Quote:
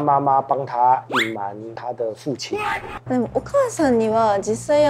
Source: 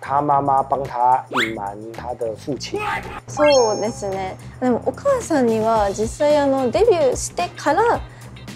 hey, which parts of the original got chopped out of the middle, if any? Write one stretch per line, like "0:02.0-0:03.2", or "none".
0:03.1-0:04.4